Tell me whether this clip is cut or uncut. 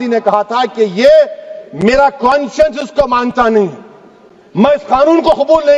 uncut